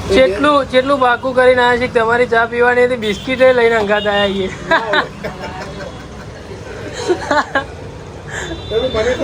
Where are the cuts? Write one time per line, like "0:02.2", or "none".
none